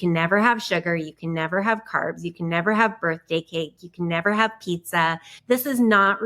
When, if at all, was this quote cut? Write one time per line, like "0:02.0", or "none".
0:05.3